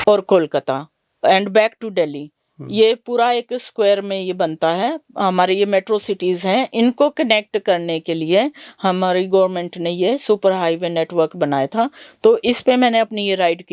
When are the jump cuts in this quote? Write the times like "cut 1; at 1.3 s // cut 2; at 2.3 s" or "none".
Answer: none